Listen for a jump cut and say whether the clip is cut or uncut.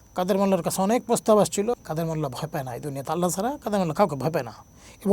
cut